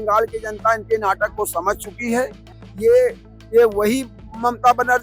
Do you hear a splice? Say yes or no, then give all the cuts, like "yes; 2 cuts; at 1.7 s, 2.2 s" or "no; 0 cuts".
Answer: no; 0 cuts